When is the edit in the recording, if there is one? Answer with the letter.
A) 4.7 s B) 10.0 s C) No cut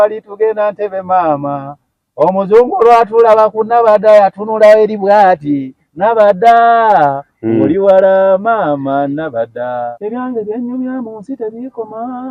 B